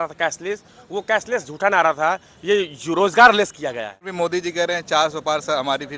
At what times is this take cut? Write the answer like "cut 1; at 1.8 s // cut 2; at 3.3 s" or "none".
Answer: cut 1; at 4.1 s